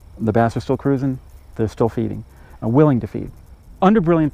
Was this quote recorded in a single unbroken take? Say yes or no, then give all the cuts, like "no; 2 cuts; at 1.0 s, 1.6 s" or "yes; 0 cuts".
yes; 0 cuts